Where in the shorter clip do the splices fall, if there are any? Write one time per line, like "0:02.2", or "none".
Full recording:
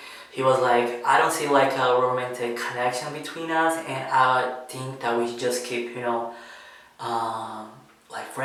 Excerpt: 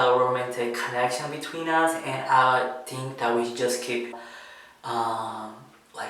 0:04.2